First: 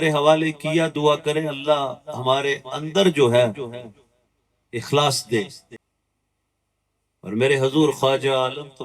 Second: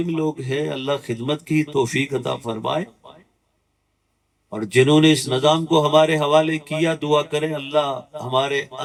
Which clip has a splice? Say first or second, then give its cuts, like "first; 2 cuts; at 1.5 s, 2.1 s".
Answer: first; 1 cut; at 5.8 s